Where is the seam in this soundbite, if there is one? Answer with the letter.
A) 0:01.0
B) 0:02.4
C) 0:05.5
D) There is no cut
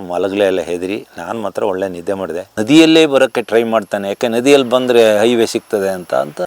B